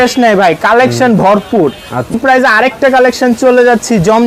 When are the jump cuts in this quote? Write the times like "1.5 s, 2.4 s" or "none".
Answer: 2.1 s